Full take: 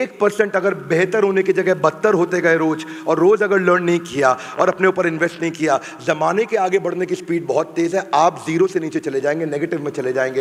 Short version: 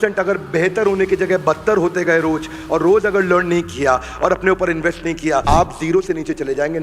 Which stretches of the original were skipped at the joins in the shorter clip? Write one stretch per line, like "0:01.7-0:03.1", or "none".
0:05.8-0:08.1